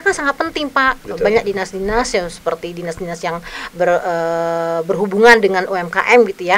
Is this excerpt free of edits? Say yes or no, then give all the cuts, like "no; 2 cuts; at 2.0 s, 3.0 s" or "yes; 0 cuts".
yes; 0 cuts